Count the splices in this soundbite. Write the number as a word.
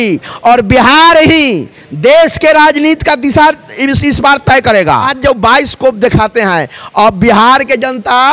one